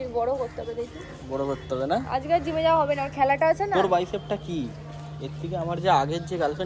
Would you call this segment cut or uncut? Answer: uncut